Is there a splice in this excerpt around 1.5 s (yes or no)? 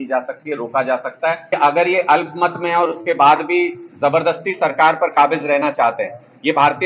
yes